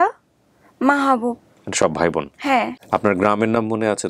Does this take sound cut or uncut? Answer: cut